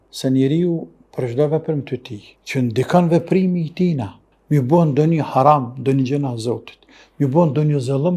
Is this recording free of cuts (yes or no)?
yes